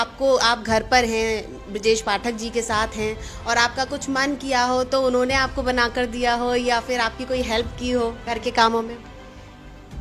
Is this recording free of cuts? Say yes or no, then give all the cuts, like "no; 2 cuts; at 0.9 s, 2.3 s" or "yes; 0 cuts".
yes; 0 cuts